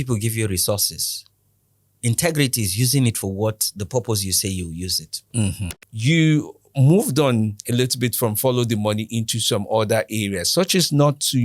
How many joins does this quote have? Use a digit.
1